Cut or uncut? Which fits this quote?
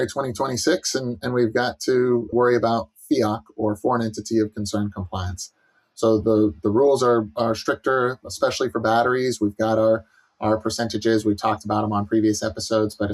cut